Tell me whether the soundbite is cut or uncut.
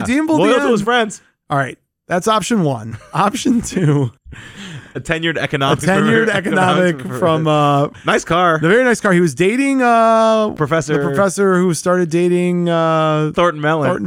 cut